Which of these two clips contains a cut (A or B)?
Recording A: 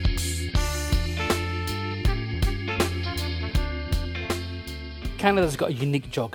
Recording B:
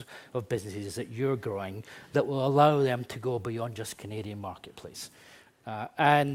A